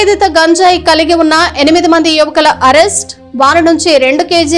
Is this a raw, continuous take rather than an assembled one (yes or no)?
yes